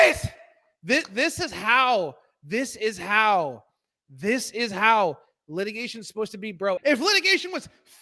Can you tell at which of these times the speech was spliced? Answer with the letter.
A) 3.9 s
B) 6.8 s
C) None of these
B